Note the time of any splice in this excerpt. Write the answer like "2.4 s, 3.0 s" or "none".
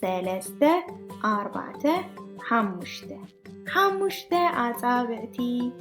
none